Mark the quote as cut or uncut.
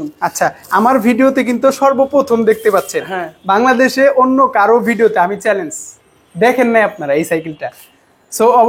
uncut